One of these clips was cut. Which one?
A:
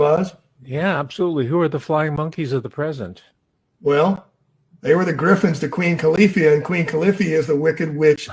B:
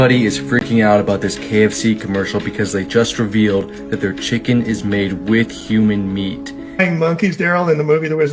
B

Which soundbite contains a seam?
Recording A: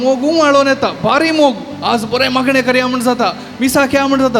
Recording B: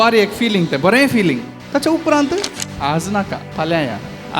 B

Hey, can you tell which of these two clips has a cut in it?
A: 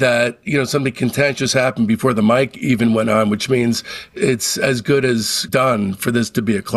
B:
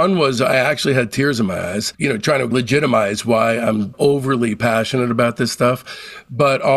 A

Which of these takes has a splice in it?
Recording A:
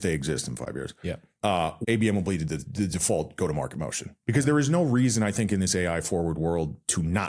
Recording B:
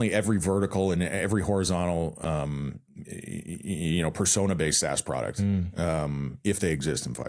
A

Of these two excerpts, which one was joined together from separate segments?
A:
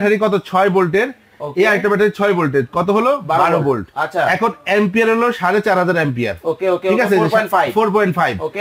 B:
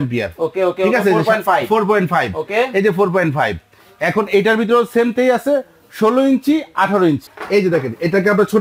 B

